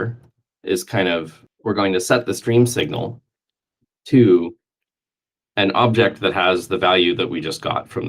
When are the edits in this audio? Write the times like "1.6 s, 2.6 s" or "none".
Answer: 1.4 s